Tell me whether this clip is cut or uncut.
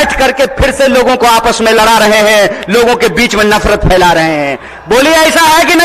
uncut